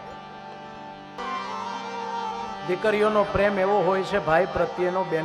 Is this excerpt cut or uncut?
cut